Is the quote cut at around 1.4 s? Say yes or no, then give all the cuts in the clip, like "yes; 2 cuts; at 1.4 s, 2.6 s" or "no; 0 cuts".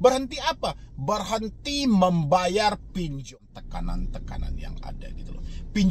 no; 1 cut; at 3.2 s